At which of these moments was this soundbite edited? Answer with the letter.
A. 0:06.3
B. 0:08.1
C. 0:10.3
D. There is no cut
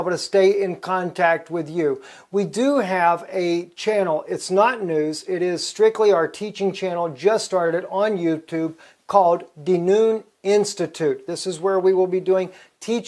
D